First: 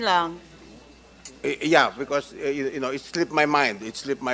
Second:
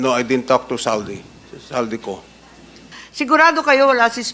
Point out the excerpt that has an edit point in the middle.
second; 1 cut; at 3.0 s

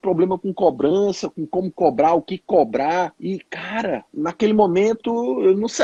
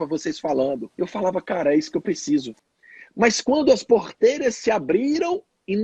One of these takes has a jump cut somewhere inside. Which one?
second; 1 cut; at 2.5 s

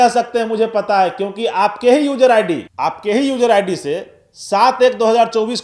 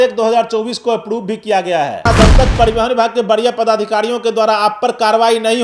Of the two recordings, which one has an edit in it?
second; 1 cut; at 2.1 s

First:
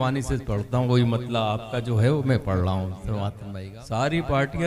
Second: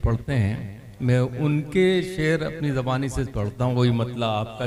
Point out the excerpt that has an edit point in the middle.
first; 1 cut; at 3.4 s

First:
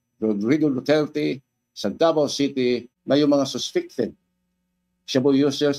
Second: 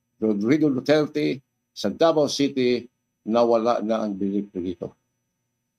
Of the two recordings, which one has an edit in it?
first; 1 cut; at 2.9 s

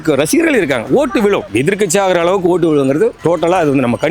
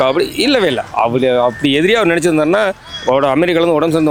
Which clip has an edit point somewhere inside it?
first; 2 cuts; at 1.5 s, 3.2 s

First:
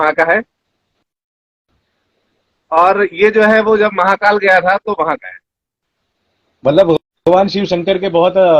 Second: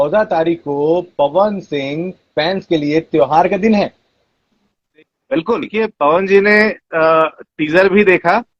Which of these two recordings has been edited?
second; 1 cut; at 5.7 s

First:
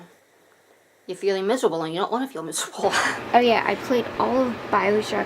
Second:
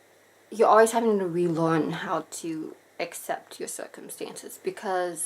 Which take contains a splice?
first; 1 cut; at 3.1 s

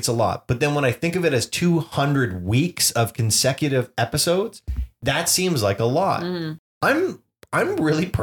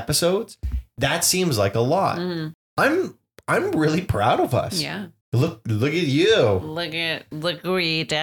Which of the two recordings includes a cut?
second; 1 cut; at 5.2 s

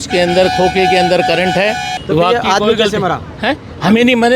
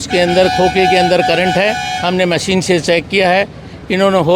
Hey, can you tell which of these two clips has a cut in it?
first; 1 cut; at 1.9 s

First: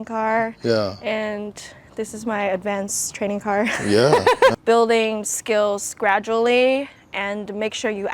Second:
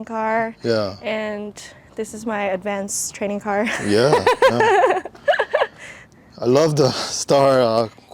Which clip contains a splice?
first; 1 cut; at 4.5 s

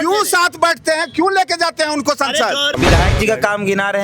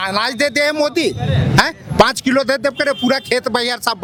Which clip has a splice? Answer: first; 1 cut; at 2.7 s

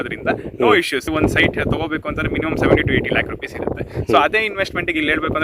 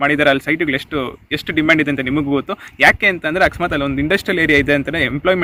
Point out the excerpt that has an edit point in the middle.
first; 1 cut; at 1.1 s

